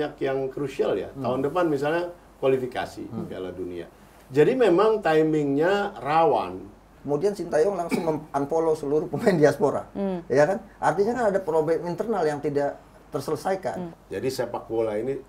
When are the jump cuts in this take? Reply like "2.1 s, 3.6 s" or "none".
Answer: 6.9 s, 13.9 s